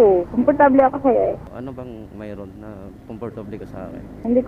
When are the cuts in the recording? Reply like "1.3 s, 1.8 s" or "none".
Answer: 1.5 s